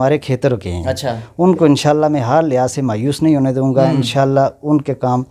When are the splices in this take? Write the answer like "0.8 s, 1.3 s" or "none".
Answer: none